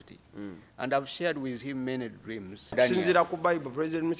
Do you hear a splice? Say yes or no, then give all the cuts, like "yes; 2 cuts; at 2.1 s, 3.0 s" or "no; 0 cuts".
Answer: yes; 1 cut; at 2.7 s